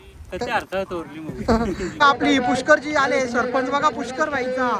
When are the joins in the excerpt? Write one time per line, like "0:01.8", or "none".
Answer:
0:01.9